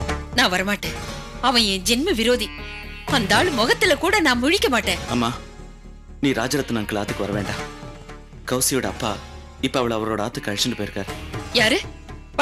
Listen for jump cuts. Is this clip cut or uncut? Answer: uncut